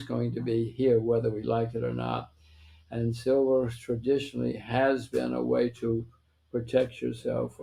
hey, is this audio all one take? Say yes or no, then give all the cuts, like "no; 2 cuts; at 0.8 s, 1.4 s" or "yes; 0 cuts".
yes; 0 cuts